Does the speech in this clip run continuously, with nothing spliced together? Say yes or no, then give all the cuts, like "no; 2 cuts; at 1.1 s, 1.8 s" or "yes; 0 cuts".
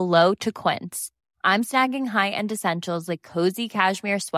yes; 0 cuts